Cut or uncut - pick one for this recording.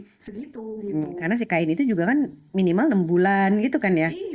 uncut